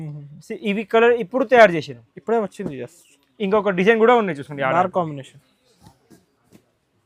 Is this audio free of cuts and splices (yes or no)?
yes